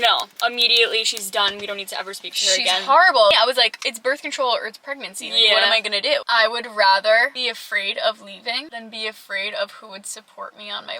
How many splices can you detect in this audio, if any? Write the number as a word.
two